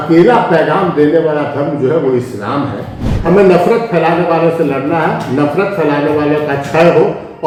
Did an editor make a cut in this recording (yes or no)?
no